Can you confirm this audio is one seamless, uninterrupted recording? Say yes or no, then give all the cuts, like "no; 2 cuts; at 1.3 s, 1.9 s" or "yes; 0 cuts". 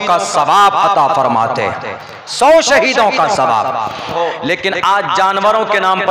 no; 1 cut; at 4.1 s